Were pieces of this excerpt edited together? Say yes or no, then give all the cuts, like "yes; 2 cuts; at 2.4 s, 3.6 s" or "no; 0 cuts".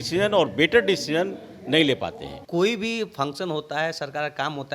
yes; 1 cut; at 2.4 s